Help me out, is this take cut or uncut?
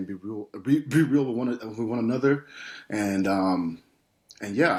uncut